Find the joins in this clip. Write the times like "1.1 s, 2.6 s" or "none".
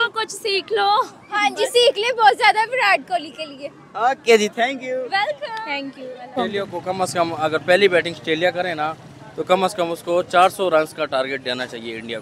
none